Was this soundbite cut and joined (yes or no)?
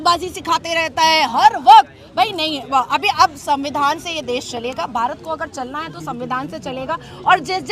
no